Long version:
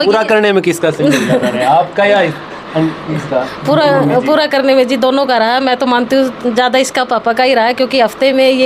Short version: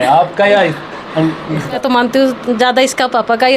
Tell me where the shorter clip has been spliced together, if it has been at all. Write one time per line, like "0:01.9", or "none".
0:01.8